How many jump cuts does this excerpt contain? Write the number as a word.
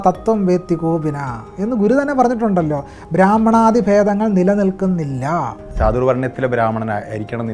one